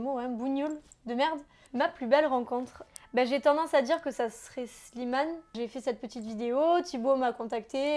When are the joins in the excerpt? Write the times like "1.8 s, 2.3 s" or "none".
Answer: 1.6 s, 5.5 s